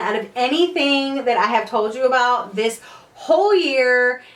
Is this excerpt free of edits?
yes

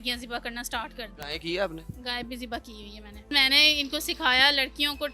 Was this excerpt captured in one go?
no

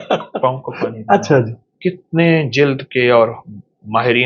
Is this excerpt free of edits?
no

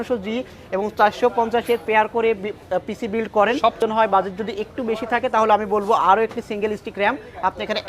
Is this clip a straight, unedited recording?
no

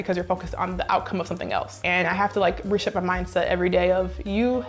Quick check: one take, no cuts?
yes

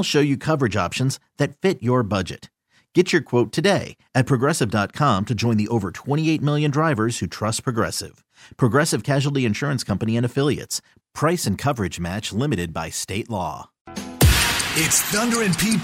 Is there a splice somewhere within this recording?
yes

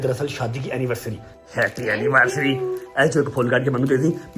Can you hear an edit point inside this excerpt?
yes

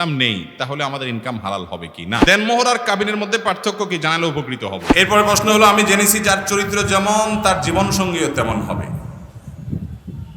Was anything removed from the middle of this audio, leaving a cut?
yes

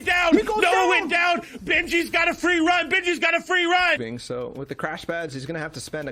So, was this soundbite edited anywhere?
yes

